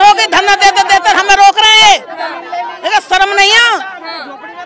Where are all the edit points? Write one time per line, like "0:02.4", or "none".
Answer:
none

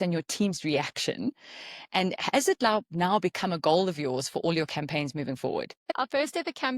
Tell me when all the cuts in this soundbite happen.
0:05.9

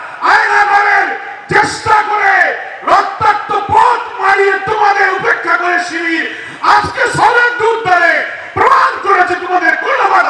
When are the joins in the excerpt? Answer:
none

